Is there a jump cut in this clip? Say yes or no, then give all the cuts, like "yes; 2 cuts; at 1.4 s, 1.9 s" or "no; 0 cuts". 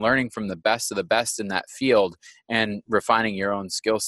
no; 0 cuts